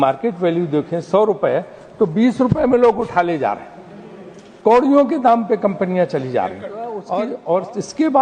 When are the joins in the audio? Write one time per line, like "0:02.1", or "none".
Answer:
0:07.0